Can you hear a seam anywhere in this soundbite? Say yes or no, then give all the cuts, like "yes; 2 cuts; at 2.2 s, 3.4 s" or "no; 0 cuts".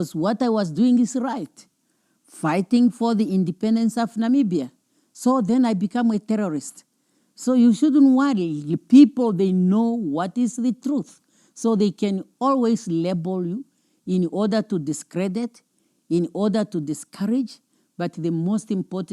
no; 0 cuts